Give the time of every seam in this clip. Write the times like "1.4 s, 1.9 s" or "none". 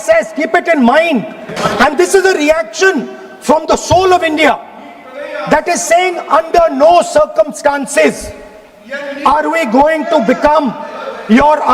1.5 s